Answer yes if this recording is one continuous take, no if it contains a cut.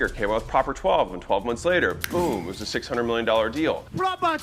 yes